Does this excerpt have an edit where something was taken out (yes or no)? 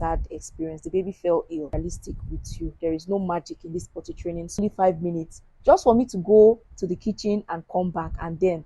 yes